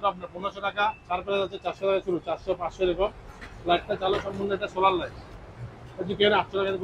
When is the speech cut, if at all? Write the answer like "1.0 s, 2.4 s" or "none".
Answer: none